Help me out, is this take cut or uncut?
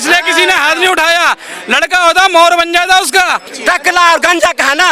cut